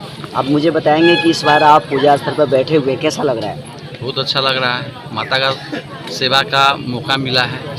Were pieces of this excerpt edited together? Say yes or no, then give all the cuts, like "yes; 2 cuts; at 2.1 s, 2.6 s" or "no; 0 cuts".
no; 0 cuts